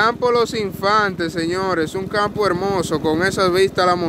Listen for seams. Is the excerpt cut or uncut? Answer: uncut